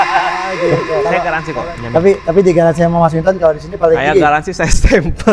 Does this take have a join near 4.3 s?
no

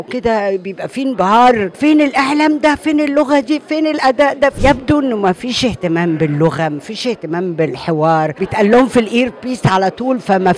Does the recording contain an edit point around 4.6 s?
yes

